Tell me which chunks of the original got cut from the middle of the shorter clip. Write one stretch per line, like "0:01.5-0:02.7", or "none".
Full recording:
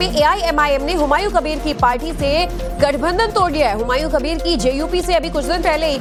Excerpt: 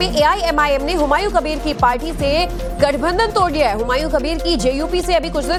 none